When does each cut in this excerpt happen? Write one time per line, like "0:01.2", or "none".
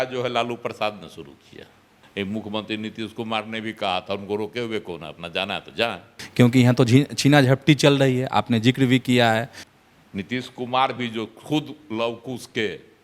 0:02.1
0:06.2
0:09.6